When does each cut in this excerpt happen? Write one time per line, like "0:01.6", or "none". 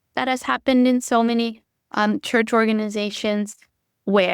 none